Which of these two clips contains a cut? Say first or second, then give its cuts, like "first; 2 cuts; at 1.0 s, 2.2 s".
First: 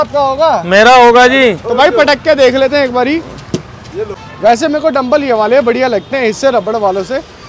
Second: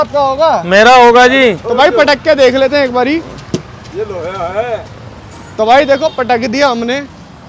first; 1 cut; at 4.2 s